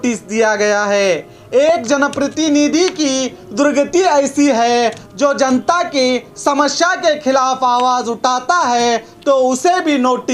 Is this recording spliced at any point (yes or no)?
no